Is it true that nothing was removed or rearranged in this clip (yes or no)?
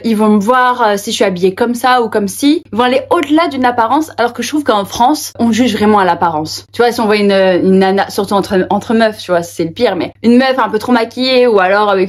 no